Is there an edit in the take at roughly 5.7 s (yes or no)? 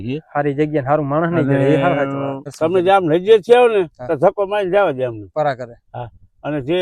no